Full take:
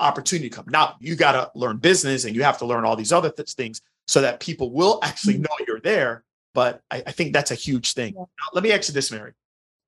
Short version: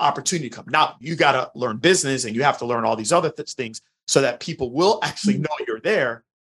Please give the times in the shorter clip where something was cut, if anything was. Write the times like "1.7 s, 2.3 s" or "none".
none